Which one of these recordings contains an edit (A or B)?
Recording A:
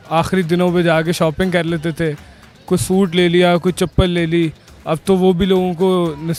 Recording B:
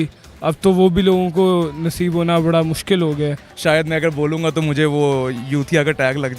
B